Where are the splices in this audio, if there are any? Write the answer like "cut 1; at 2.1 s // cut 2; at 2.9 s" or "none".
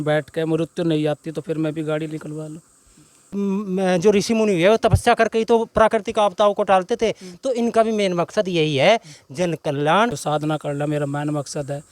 cut 1; at 3.3 s // cut 2; at 10.2 s